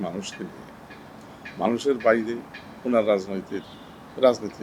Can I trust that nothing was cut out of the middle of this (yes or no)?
yes